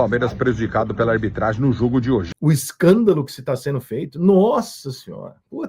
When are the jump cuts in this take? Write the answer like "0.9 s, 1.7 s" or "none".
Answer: 2.3 s